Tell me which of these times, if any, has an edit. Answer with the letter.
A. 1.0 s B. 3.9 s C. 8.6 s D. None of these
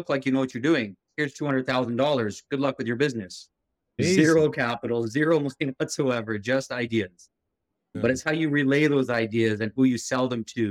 D